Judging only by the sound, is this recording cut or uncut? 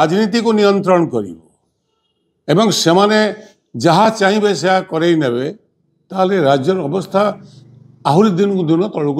uncut